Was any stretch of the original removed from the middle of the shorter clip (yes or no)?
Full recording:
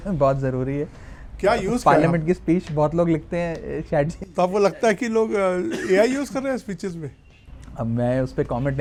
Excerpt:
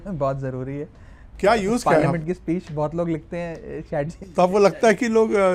no